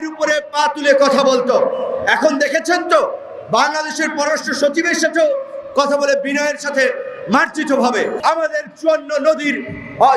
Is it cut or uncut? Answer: cut